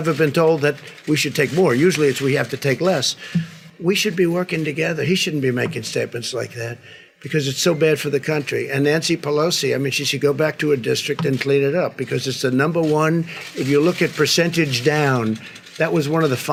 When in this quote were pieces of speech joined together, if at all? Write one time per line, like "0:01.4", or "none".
none

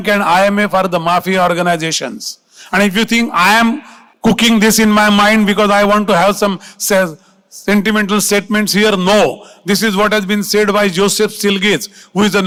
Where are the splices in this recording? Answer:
none

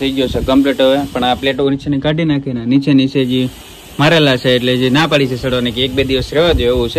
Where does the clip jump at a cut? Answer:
none

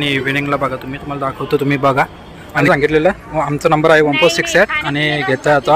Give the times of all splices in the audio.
0:02.7

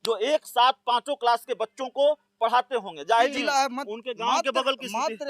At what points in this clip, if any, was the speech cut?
0:03.3

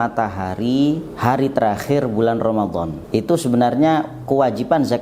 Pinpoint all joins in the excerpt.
0:01.1
0:03.0

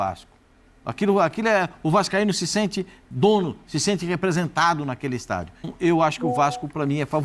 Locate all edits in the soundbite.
0:05.7

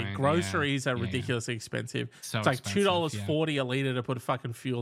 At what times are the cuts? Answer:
none

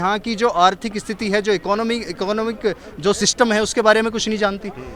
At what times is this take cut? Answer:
none

